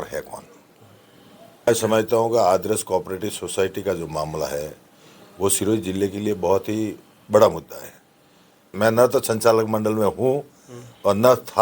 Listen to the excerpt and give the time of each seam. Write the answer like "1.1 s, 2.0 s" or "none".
1.7 s, 8.7 s